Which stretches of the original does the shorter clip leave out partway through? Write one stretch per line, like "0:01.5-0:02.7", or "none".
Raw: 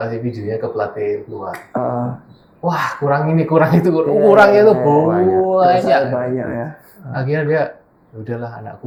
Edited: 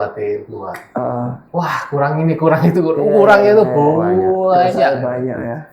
0:02.2-0:02.5